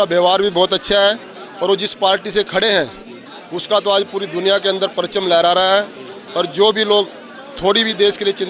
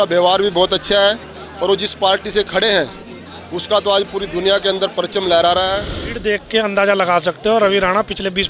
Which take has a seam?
second; 1 cut; at 6.2 s

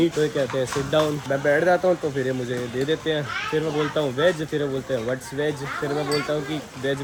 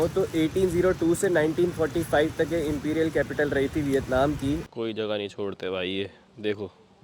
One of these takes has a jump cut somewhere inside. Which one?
second; 1 cut; at 4.6 s

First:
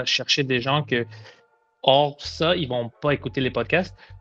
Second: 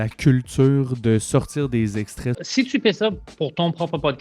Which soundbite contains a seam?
second; 1 cut; at 2.3 s

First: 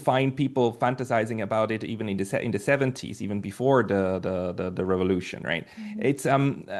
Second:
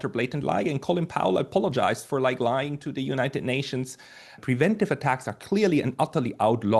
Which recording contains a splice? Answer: second; 1 cut; at 4.4 s

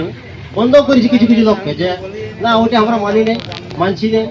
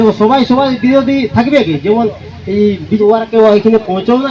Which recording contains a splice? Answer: second; 1 cut; at 3.0 s

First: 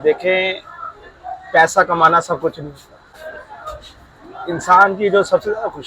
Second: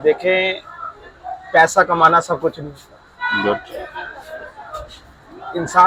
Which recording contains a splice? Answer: first; 1 cut; at 3.0 s

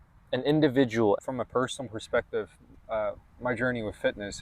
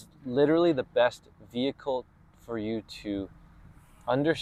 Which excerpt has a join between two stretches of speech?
first; 1 cut; at 1.2 s

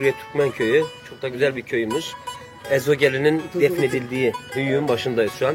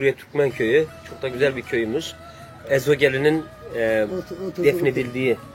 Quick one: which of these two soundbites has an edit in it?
first; 1 cut; at 3.5 s

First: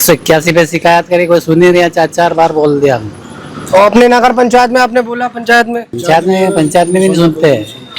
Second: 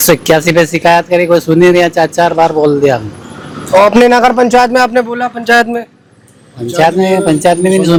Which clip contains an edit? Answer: first; 1 cut; at 5.9 s

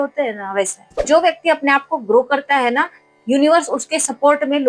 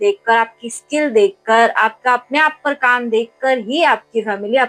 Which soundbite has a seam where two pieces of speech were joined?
first; 1 cut; at 1.1 s

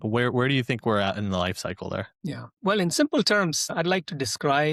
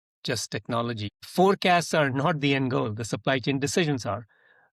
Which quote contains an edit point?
second; 1 cut; at 1.2 s

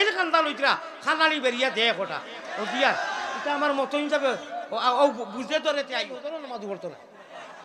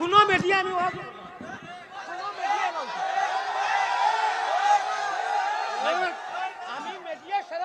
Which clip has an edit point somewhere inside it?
first; 1 cut; at 6.2 s

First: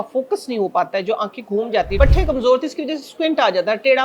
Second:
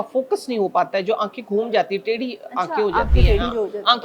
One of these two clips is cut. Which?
first; 1 cut; at 2.0 s

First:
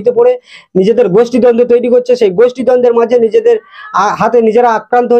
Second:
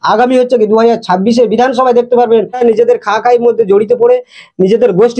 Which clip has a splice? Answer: second; 1 cut; at 2.6 s

